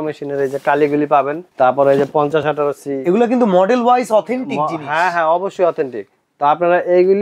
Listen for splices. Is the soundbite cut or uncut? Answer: cut